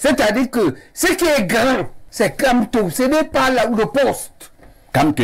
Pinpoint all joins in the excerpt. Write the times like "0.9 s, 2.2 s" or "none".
none